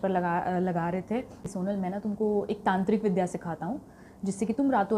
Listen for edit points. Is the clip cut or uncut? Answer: cut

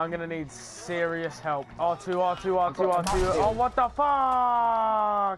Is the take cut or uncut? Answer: cut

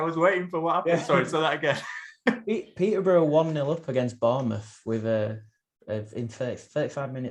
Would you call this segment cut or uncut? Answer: uncut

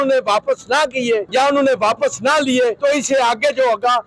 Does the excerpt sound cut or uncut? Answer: uncut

